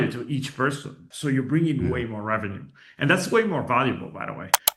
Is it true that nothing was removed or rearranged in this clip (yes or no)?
no